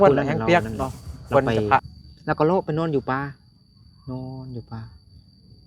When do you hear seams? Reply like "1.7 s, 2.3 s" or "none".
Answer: 1.9 s